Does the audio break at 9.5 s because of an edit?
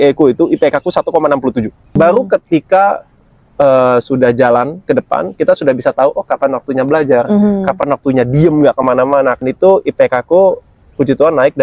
yes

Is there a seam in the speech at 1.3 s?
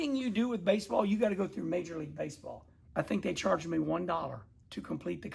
no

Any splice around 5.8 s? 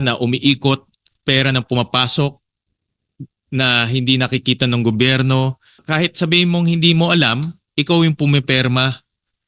yes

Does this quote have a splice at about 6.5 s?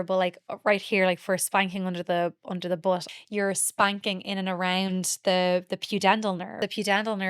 yes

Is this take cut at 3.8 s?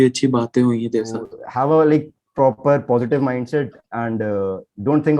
no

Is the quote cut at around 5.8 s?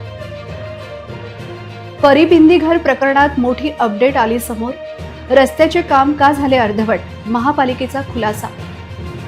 no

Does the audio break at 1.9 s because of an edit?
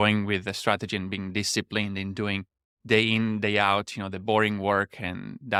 no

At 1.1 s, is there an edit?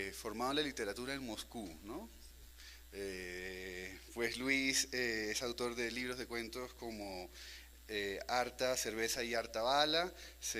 no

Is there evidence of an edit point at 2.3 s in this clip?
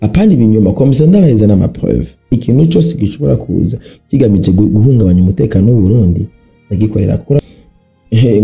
yes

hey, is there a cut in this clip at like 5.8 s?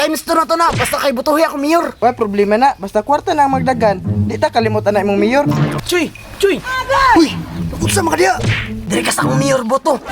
yes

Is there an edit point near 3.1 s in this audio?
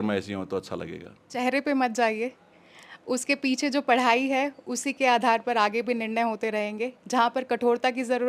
no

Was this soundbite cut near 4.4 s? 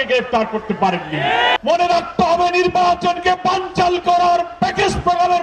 no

